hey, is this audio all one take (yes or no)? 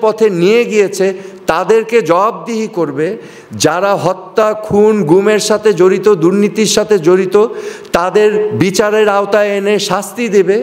yes